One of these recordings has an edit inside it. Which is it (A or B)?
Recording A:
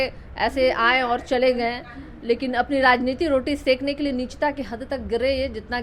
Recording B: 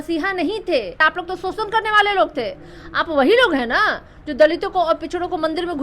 B